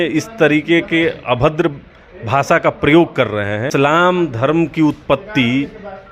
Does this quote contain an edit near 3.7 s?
yes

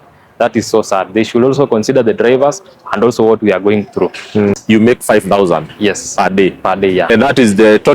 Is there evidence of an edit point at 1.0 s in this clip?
no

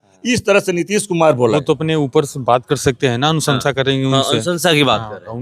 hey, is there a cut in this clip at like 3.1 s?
no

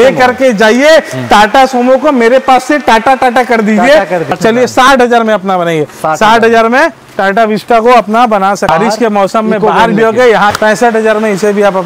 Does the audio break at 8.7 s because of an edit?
yes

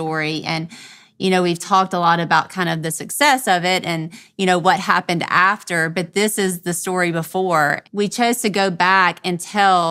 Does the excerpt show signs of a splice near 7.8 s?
yes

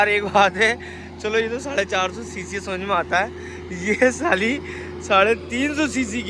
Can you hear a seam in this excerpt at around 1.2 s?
no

